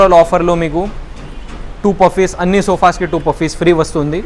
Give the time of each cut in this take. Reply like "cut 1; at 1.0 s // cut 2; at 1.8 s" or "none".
none